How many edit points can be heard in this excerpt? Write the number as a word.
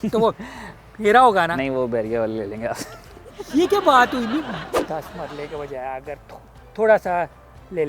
one